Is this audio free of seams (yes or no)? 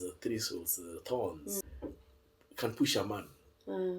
no